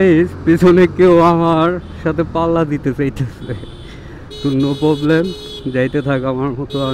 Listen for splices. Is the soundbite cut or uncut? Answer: uncut